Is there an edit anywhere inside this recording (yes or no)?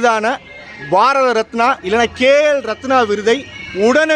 no